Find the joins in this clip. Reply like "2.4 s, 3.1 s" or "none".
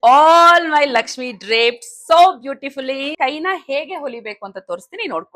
3.1 s